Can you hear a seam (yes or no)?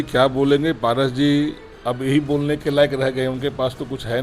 no